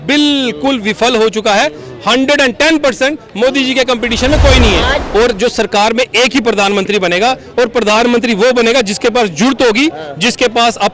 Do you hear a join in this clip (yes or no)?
yes